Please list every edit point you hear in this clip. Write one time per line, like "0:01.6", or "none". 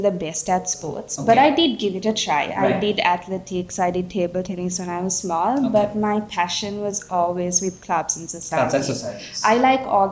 none